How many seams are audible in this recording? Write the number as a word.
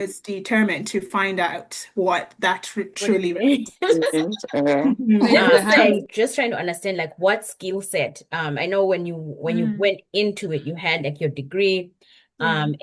one